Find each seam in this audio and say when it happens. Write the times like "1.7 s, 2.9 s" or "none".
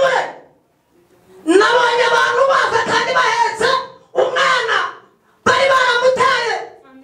none